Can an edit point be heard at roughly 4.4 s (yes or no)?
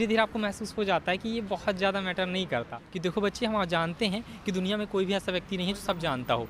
no